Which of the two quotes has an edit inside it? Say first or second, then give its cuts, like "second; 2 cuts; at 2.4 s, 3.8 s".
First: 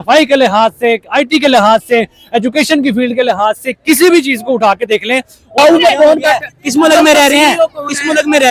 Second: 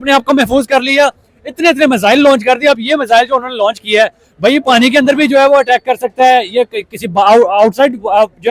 first; 1 cut; at 5.6 s